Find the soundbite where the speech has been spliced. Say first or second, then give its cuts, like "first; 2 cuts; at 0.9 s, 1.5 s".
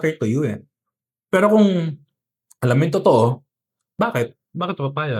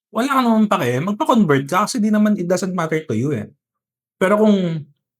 first; 1 cut; at 3.9 s